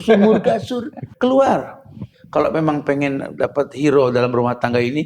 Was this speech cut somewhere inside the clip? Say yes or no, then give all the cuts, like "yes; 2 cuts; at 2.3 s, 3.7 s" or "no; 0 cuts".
yes; 2 cuts; at 1.0 s, 2.1 s